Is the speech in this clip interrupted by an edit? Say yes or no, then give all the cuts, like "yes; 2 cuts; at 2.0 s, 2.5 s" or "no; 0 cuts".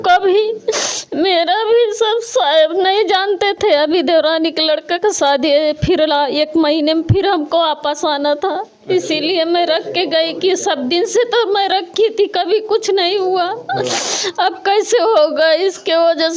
no; 0 cuts